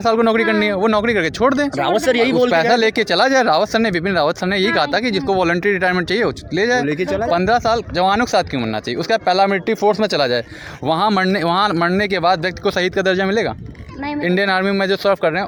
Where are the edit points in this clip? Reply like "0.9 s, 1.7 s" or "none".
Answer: none

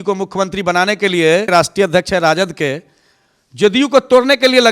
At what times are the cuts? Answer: 1.4 s

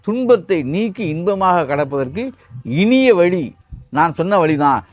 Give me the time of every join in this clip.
none

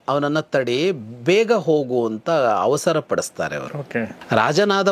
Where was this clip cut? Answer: none

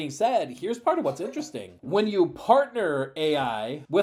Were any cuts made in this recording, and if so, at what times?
none

